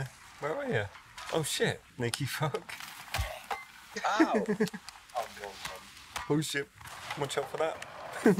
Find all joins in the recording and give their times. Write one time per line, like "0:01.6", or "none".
none